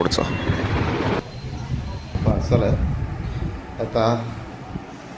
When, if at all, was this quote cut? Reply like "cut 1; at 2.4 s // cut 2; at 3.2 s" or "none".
cut 1; at 1.6 s